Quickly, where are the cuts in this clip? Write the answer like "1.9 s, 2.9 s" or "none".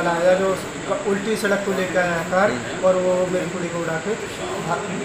none